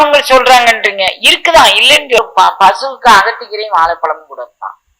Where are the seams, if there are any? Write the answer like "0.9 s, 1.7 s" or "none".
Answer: 2.2 s